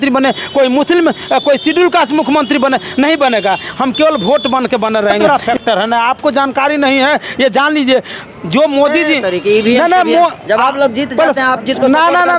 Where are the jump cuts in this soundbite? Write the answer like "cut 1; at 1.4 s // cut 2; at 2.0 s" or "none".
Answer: cut 1; at 5.2 s